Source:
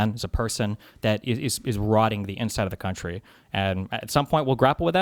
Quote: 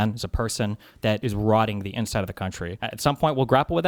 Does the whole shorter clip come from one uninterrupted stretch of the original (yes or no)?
no